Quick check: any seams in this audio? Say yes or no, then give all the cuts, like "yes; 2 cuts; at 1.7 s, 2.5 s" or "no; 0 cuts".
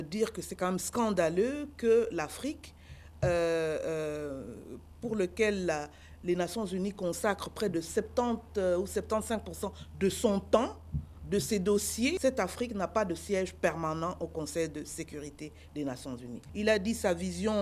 yes; 2 cuts; at 12.2 s, 16.4 s